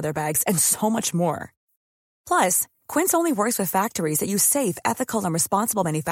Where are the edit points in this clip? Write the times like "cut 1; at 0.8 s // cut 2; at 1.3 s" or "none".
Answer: none